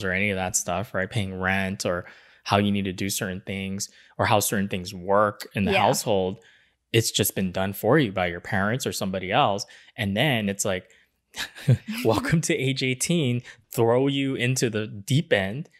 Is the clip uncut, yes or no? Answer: yes